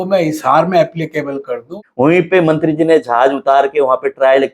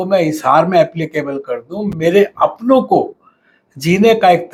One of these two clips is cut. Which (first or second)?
first